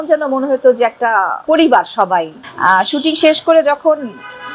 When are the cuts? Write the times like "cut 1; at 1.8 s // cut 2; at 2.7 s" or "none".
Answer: cut 1; at 1.3 s // cut 2; at 2.4 s